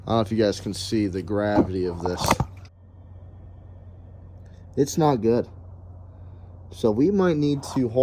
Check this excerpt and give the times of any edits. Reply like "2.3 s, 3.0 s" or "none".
none